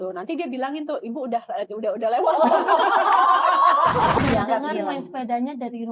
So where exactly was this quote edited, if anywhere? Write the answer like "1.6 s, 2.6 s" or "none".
4.2 s